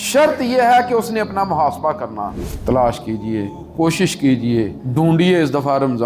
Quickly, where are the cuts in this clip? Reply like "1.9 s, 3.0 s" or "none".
2.3 s, 3.6 s, 4.8 s